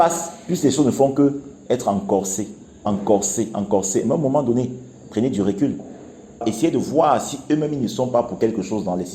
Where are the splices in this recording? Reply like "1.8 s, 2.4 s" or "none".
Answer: 6.4 s